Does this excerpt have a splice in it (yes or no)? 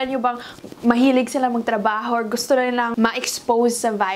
yes